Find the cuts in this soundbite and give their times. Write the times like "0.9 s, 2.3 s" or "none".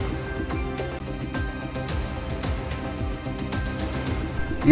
1.0 s